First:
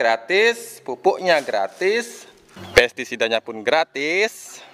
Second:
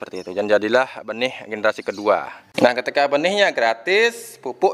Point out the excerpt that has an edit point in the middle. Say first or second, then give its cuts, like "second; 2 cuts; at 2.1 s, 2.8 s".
second; 1 cut; at 2.4 s